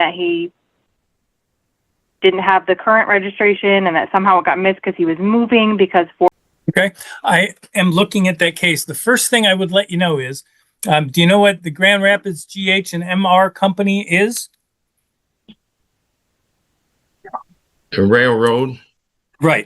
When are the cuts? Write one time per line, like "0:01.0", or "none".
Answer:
0:06.3